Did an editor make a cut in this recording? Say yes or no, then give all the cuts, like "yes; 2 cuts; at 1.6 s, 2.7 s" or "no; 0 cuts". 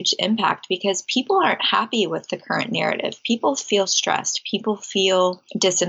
no; 0 cuts